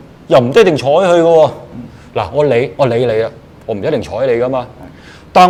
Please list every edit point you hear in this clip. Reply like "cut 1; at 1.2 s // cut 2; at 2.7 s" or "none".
none